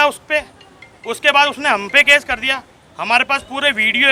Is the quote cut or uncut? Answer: uncut